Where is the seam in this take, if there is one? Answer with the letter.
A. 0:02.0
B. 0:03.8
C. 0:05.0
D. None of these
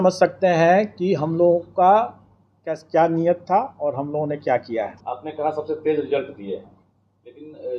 C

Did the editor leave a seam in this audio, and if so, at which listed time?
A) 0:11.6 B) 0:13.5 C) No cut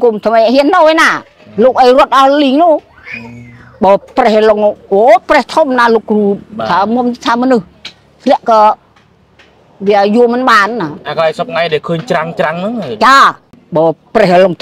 B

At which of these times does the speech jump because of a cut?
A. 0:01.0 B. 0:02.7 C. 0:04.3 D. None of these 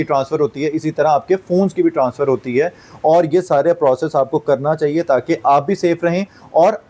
D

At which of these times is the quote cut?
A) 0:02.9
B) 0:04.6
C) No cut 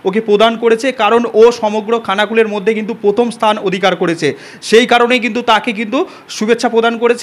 C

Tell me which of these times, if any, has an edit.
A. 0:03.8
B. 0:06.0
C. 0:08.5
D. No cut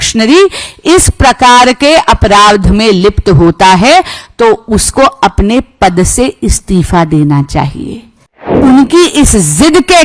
C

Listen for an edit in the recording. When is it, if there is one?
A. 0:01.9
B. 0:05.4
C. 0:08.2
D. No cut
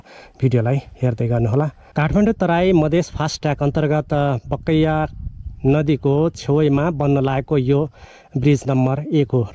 A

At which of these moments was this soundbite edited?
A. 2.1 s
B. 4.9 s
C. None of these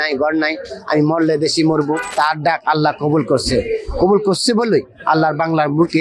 A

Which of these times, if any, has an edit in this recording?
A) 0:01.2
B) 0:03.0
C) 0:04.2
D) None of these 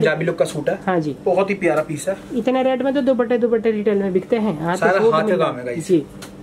D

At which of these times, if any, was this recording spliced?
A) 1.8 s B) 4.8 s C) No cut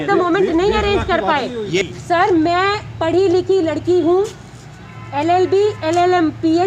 A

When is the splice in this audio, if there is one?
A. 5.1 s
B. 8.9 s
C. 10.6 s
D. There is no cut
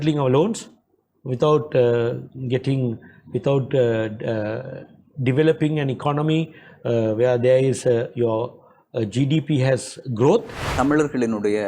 C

